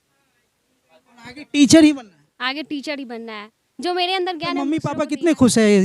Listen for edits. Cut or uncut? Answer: cut